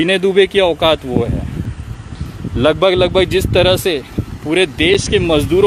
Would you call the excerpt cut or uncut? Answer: uncut